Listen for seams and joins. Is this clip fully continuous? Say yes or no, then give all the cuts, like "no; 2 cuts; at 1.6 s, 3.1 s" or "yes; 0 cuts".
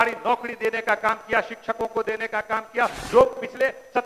no; 1 cut; at 3.0 s